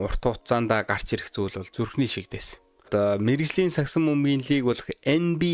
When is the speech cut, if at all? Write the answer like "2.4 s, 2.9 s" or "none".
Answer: 2.9 s